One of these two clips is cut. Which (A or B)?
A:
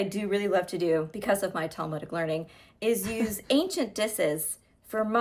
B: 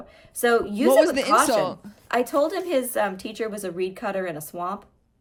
A